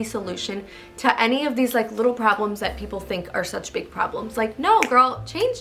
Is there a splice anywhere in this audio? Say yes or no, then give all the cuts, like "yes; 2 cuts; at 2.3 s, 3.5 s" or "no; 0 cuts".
no; 0 cuts